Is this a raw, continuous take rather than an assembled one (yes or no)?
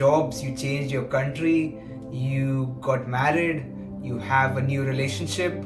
yes